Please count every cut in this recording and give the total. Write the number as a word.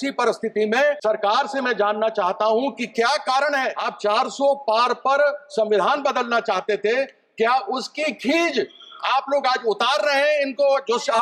two